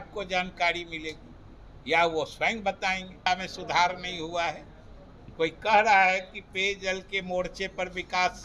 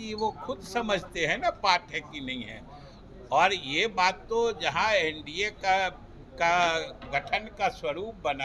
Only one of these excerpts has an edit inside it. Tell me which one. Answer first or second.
first